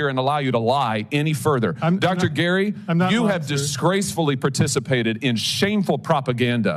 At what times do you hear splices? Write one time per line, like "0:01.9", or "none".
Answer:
none